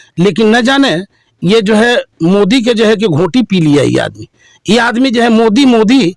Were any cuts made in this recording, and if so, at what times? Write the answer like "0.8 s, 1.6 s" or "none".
none